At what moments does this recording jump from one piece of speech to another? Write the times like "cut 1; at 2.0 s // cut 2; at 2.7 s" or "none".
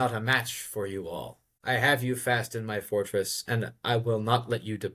cut 1; at 1.4 s

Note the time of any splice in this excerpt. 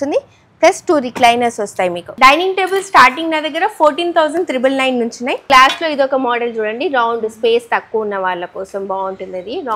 cut 1; at 2.0 s // cut 2; at 5.4 s

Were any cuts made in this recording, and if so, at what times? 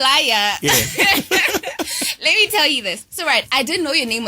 cut 1; at 3.0 s

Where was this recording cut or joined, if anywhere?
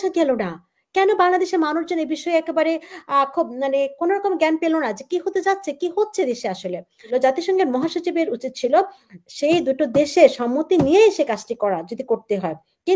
cut 1; at 7.1 s

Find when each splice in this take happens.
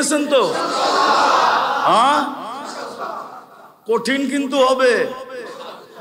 none

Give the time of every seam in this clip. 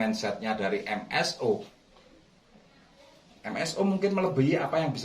cut 1; at 1.7 s

